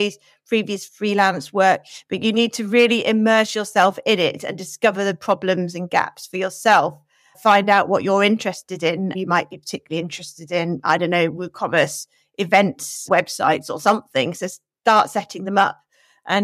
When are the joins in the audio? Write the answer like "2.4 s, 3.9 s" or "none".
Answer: 7.4 s, 9.1 s, 13.1 s

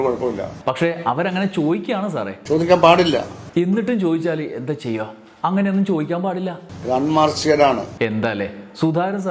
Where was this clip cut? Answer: none

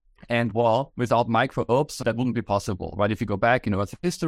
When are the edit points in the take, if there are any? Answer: 0.9 s, 1.9 s

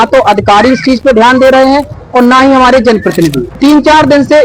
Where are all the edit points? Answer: 3.5 s

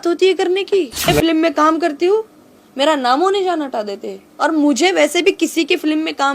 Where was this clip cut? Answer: 1.1 s

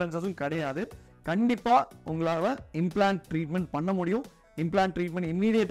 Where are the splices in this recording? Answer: 1.1 s

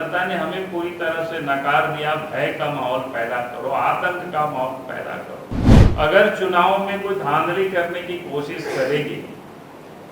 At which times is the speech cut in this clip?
5.8 s

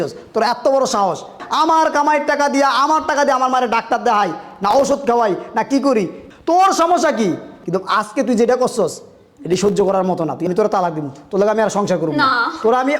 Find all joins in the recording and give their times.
1.4 s, 6.2 s, 7.5 s, 10.5 s

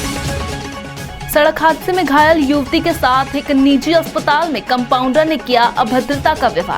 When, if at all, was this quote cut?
1.1 s

